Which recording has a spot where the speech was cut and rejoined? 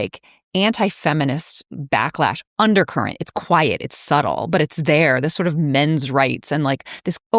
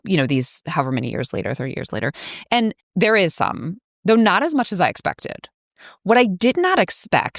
second; 1 cut; at 2.8 s

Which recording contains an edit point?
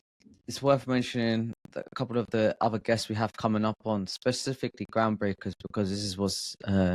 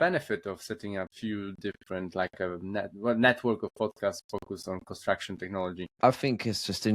second; 2 cuts; at 1.1 s, 5.9 s

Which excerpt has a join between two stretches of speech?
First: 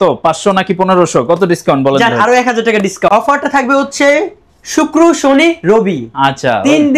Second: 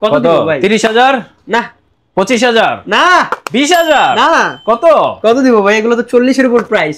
first; 1 cut; at 3.1 s

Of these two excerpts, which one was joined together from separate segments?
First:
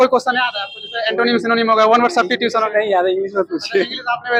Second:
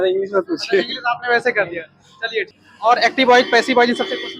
second; 1 cut; at 2.5 s

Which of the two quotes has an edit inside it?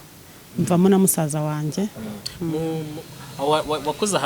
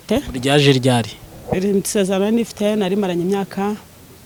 first; 1 cut; at 2.0 s

